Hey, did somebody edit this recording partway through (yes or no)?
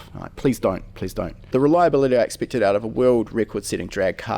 yes